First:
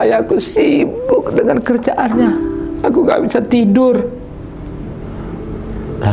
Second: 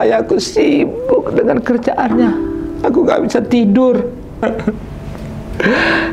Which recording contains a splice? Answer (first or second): second